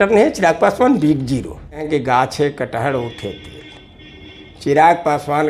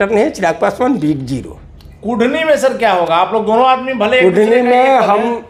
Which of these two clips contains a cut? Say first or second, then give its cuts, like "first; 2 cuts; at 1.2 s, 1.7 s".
first; 1 cut; at 1.8 s